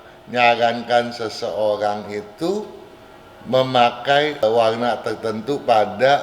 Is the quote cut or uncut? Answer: cut